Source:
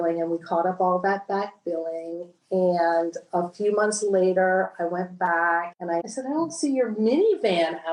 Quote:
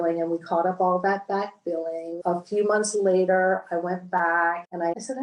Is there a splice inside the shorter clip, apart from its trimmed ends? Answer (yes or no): yes